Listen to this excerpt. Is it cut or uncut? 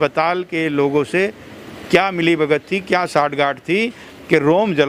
uncut